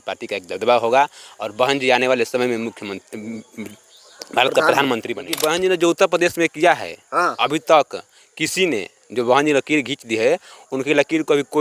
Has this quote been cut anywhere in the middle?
yes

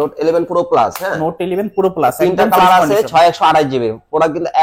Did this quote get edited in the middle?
no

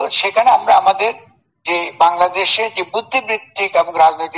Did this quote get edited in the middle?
no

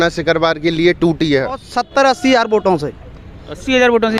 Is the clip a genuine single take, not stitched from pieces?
no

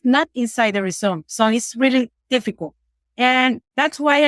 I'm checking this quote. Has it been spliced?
no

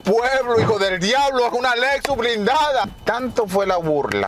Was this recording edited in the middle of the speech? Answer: yes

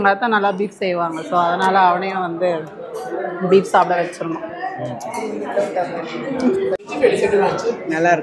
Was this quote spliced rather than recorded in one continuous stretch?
no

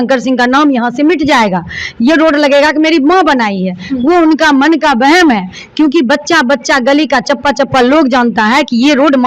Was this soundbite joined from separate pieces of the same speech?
no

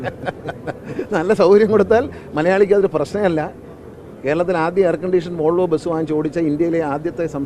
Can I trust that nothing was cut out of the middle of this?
yes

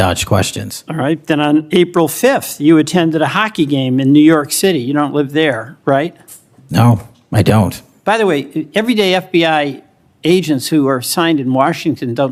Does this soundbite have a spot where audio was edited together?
no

